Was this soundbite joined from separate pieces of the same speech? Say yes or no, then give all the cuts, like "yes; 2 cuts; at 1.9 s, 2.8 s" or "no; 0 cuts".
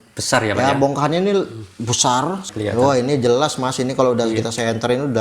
yes; 1 cut; at 2.4 s